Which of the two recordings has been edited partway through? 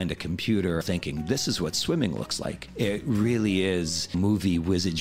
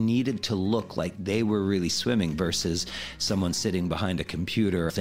first; 1 cut; at 2.6 s

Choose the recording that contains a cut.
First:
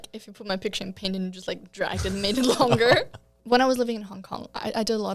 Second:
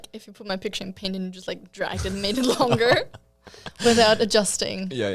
first; 1 cut; at 3.3 s

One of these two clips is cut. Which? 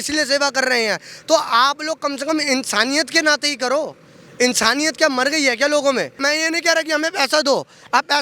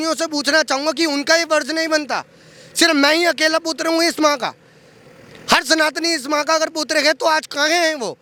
first; 1 cut; at 6.2 s

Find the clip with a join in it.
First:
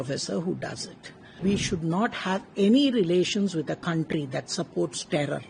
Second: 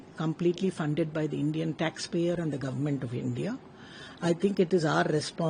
first; 1 cut; at 1.4 s

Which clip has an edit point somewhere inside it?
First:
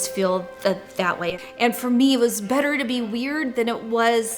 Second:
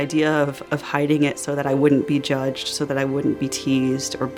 first; 1 cut; at 1.1 s

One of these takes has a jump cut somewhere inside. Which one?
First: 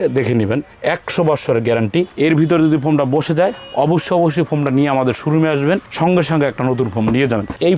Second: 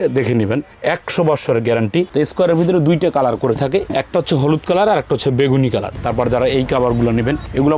second; 3 cuts; at 2.1 s, 3.9 s, 5.9 s

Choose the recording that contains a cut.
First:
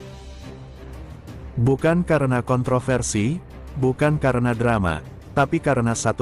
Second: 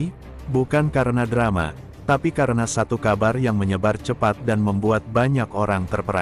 first; 1 cut; at 1.5 s

